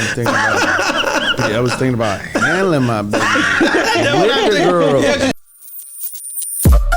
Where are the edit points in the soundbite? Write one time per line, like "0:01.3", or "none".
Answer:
0:05.3